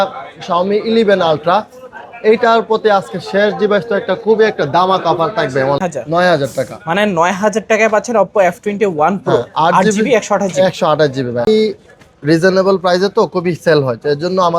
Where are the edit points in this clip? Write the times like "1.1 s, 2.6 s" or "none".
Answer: 5.8 s, 11.5 s